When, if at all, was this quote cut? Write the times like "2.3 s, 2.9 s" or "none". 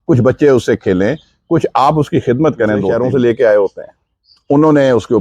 2.9 s